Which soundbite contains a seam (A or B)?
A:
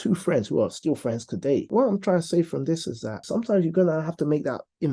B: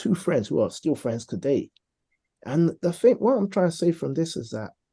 A